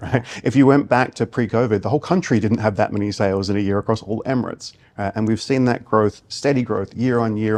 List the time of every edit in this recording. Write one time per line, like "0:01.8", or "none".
none

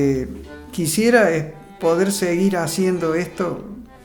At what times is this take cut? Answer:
none

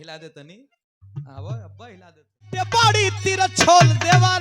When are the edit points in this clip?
0:02.7

